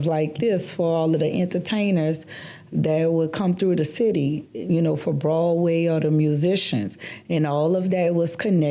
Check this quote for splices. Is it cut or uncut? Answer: uncut